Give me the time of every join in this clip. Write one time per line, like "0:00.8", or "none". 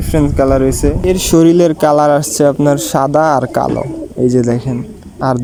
none